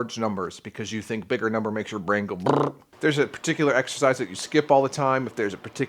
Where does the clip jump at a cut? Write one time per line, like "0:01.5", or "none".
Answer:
0:02.8